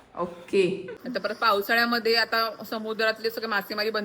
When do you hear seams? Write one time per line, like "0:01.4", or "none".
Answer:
0:00.9

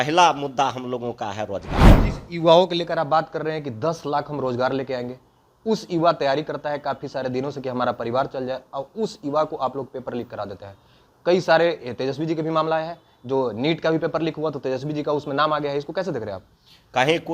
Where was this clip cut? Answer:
0:01.9

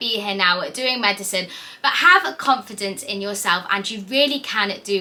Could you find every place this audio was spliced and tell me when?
none

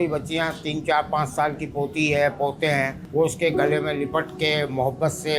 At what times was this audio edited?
0:03.0

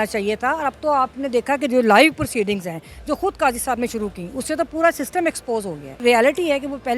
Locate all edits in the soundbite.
0:06.0

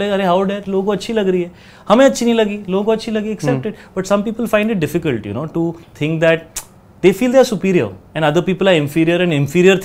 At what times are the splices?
none

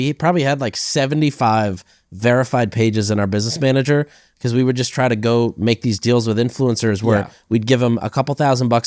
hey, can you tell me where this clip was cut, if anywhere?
none

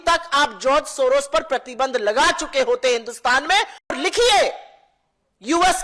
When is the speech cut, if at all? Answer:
0:03.9

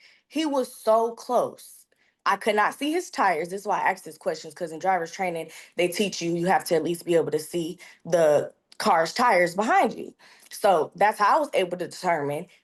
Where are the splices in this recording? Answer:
none

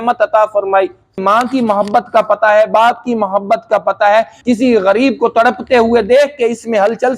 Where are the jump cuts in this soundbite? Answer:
0:01.2
0:04.3

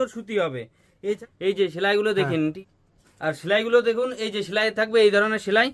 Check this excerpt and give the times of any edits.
0:01.2
0:02.6

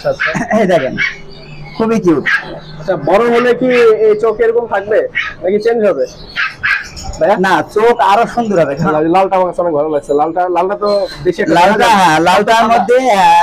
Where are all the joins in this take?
0:08.9

